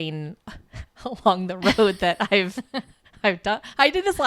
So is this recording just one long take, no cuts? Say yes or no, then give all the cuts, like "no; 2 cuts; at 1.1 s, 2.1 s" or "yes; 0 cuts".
yes; 0 cuts